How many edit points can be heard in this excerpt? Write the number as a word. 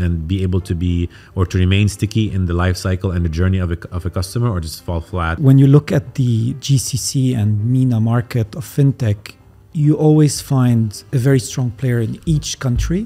one